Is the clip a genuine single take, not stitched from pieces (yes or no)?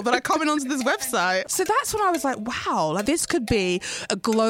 no